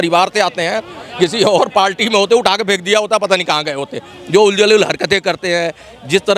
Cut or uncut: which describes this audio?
uncut